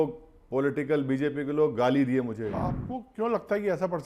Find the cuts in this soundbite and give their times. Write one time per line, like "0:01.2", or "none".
0:02.5

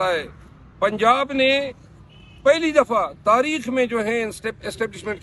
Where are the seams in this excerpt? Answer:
none

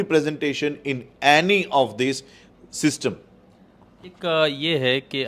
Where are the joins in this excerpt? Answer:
none

